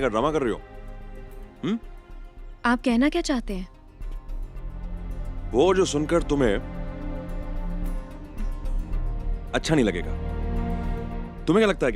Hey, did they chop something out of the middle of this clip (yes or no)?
no